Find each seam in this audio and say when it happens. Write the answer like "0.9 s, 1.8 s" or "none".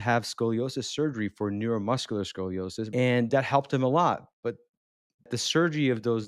2.9 s, 5.3 s